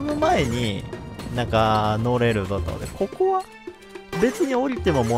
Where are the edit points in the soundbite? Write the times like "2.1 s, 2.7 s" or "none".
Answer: none